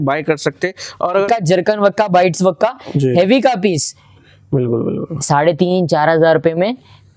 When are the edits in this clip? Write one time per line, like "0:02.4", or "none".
0:01.2